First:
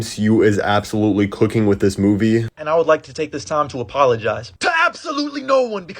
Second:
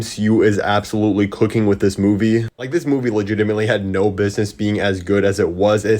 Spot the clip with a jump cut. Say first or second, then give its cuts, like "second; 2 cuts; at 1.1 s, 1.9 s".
first; 1 cut; at 2.5 s